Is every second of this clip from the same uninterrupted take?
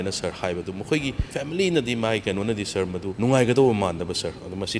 no; 2 cuts; at 1.2 s, 3.1 s

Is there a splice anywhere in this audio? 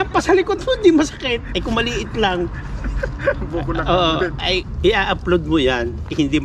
yes; 1 cut; at 4.6 s

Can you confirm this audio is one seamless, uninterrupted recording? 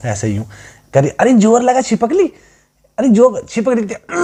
yes; 0 cuts

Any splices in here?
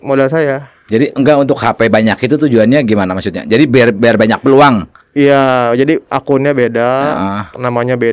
no; 0 cuts

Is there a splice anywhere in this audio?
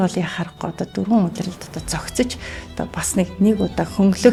no; 0 cuts

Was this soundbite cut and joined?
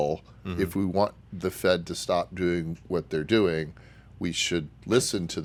no; 0 cuts

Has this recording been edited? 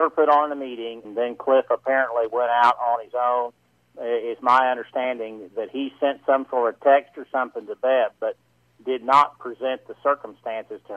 yes; 1 cut; at 1.0 s

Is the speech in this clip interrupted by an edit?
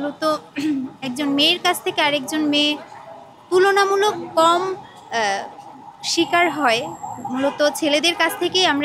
no; 0 cuts

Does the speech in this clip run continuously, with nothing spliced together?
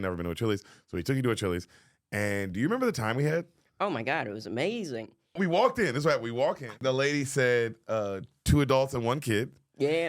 no; 2 cuts; at 5.4 s, 6.8 s

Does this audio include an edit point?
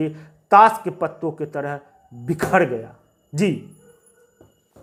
no; 0 cuts

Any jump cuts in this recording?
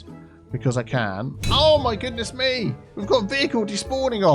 yes; 2 cuts; at 1.4 s, 2.9 s

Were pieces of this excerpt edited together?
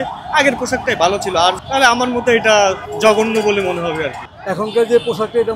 yes; 3 cuts; at 1.6 s, 2.9 s, 4.2 s

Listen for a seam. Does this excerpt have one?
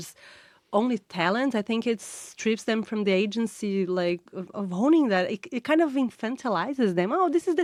no; 0 cuts

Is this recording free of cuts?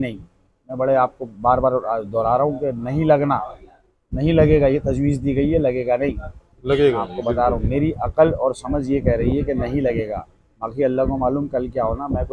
yes; 0 cuts

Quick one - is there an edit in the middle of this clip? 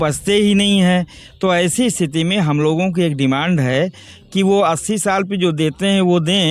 no; 0 cuts

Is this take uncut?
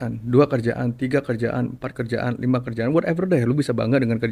yes; 0 cuts

